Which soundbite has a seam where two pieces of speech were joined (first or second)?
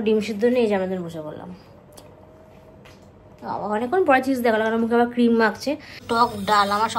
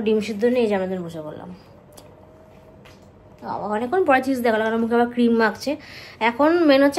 first